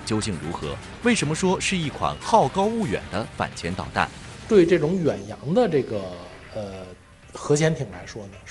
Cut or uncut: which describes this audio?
cut